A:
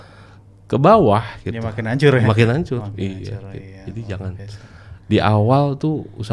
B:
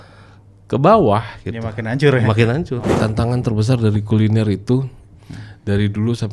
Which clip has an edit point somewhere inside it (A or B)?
B